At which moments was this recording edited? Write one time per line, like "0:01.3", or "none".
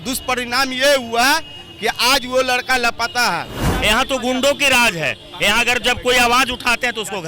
0:03.6